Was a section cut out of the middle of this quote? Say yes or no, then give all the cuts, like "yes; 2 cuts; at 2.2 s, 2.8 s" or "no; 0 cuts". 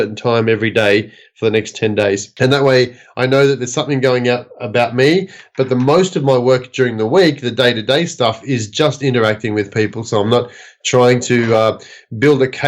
yes; 1 cut; at 2.3 s